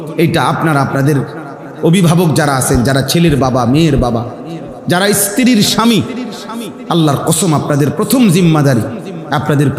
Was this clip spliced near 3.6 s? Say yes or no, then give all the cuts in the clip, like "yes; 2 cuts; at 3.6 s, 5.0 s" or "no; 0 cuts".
no; 0 cuts